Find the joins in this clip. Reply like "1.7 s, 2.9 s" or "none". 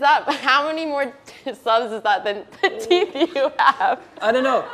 none